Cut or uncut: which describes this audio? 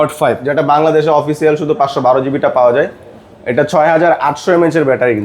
uncut